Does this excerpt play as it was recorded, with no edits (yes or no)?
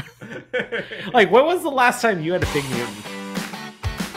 no